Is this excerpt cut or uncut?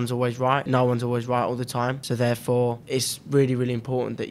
cut